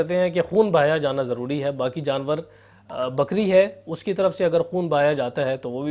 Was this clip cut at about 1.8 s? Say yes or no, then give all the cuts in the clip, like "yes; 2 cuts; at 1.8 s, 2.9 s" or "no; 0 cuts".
no; 0 cuts